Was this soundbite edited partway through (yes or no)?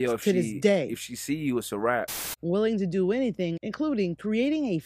yes